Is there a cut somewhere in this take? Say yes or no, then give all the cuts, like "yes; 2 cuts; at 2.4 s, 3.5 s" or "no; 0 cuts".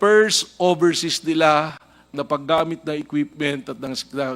no; 0 cuts